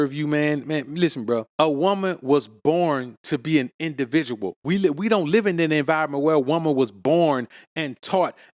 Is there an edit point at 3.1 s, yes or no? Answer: no